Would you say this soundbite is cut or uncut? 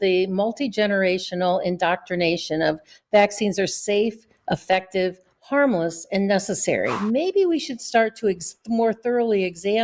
cut